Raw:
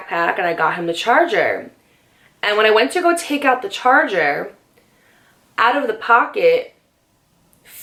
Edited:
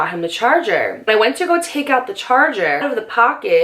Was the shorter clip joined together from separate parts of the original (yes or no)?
yes